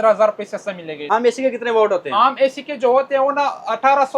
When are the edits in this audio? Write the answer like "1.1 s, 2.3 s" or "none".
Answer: 1.0 s